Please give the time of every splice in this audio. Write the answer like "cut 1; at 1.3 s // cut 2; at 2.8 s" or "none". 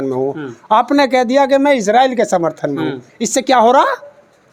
none